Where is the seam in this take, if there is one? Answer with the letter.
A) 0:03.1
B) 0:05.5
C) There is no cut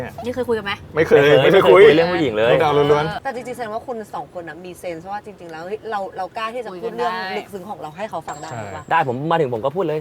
A